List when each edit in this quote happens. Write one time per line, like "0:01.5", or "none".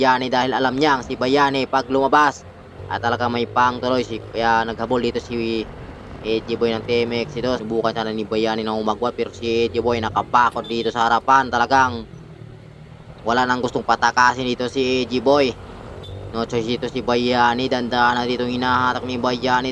0:07.6

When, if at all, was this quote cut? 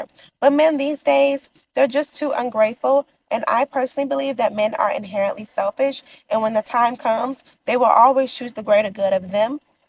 0:06.1

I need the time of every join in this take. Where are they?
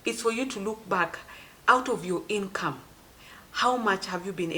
none

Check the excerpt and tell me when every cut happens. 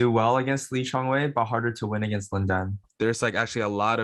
0:02.9

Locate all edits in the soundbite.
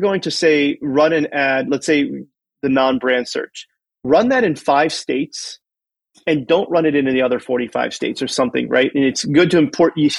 none

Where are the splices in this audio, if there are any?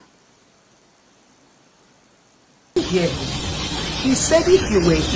0:02.8

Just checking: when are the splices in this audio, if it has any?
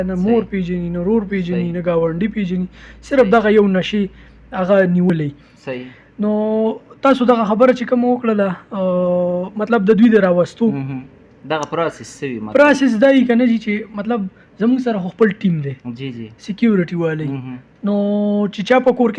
none

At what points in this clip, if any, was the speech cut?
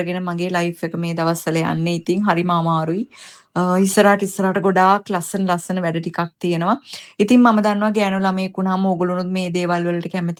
none

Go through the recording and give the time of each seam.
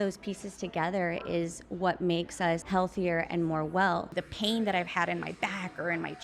0:02.6
0:04.2

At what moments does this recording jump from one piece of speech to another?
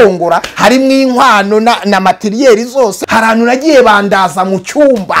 0:03.0

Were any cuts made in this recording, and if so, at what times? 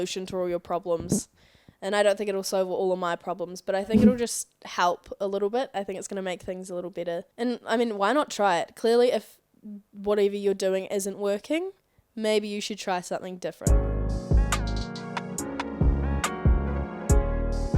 0:07.3
0:13.6

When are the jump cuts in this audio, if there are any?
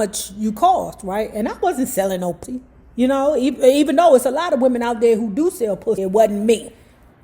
0:02.4
0:06.0

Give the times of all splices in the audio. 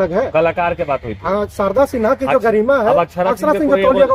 none

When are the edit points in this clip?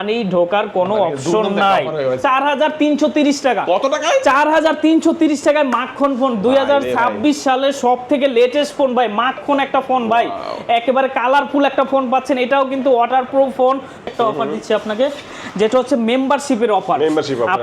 0:02.2
0:14.1

